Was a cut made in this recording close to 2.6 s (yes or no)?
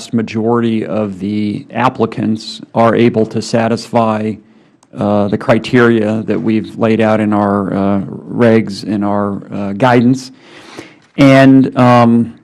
no